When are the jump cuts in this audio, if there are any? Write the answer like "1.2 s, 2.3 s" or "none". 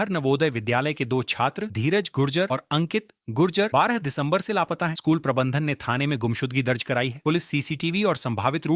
none